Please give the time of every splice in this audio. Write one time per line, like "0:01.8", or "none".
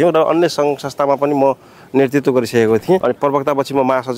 0:03.0